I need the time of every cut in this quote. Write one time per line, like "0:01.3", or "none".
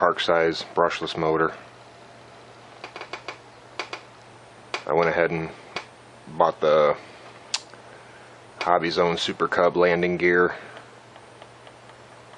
0:05.2